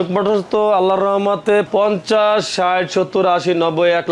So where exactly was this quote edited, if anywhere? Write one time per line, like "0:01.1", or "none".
0:01.7